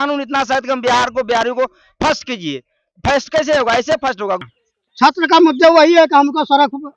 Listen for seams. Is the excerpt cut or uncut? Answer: cut